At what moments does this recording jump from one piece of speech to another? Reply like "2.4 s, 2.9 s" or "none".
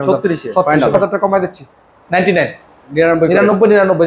1.0 s